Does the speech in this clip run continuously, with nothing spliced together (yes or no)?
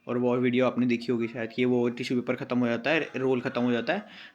yes